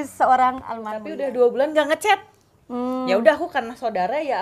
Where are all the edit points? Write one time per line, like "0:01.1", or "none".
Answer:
0:01.0